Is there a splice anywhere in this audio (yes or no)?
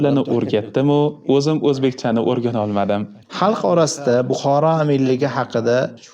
no